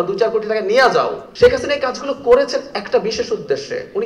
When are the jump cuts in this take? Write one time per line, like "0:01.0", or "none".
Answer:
0:01.2